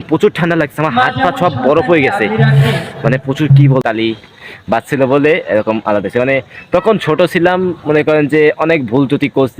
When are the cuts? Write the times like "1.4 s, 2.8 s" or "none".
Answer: 3.8 s